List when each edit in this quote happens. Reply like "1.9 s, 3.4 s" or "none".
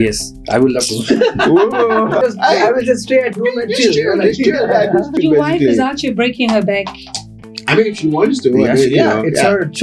2.2 s, 5.2 s